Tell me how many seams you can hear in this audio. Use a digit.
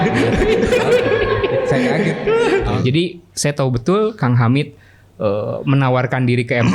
1